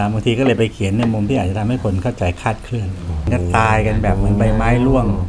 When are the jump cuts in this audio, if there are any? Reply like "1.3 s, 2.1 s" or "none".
3.3 s